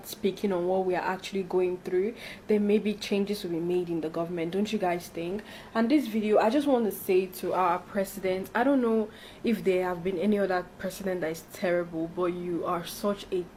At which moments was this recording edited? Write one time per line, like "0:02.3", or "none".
none